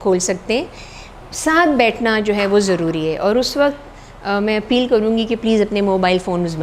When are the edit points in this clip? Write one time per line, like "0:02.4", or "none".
none